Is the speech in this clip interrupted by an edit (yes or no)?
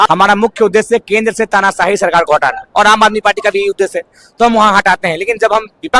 no